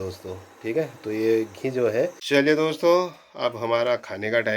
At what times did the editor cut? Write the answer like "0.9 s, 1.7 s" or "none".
2.2 s